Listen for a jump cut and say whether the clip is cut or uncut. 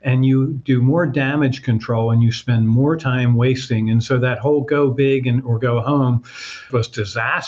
uncut